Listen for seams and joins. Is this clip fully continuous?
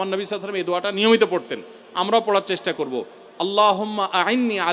yes; 0 cuts

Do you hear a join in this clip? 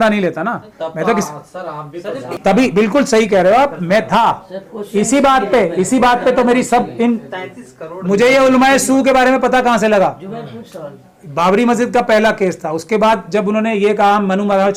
no; 0 cuts

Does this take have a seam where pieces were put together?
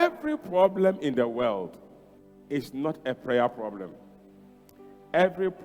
no; 0 cuts

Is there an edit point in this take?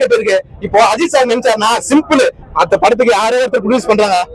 yes; 1 cut; at 2.4 s

